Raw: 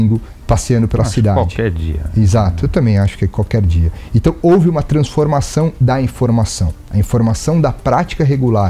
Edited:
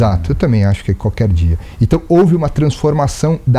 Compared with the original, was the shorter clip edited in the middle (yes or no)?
no